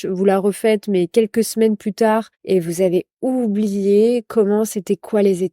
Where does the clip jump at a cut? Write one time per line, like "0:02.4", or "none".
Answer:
0:02.3